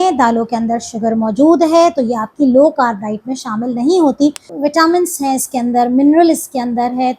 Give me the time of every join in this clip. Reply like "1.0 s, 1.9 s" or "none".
4.5 s

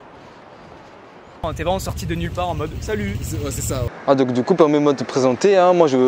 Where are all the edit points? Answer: 1.4 s, 3.8 s

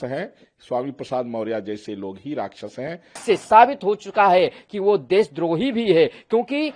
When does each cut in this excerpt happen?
3.1 s

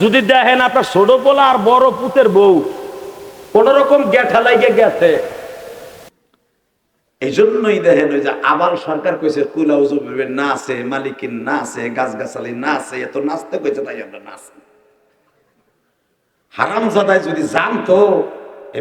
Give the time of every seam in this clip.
6.1 s

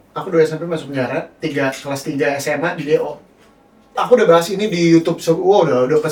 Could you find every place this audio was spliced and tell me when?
none

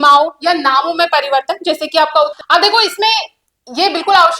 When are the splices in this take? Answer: 2.4 s

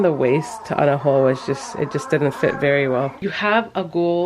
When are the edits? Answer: 3.4 s

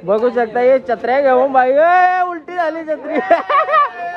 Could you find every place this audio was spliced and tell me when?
none

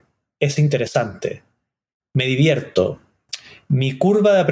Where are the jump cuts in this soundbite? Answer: none

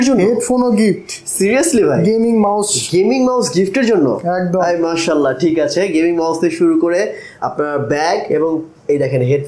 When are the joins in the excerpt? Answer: none

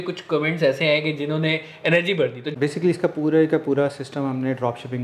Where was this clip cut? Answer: 2.4 s

